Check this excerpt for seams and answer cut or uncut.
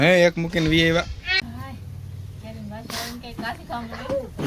cut